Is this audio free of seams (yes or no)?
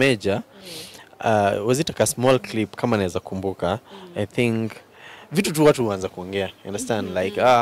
yes